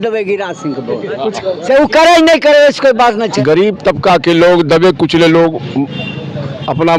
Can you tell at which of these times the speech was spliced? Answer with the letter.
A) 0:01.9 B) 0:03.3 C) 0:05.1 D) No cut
B